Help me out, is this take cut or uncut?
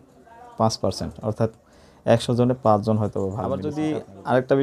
cut